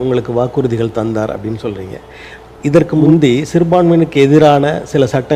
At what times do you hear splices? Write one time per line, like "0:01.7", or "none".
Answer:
none